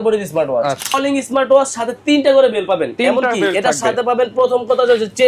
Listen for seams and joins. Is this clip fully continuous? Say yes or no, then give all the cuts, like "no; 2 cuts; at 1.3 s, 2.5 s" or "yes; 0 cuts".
no; 1 cut; at 0.9 s